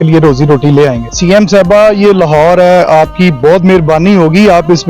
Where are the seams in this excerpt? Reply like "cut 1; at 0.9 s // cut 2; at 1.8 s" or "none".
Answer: cut 1; at 1.1 s